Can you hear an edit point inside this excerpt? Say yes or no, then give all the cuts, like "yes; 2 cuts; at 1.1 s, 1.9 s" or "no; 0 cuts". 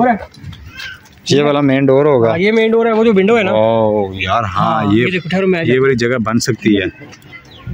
no; 0 cuts